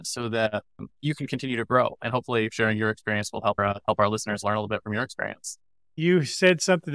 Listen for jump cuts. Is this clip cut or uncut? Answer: cut